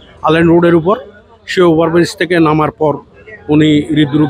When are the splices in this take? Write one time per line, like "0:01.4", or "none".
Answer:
none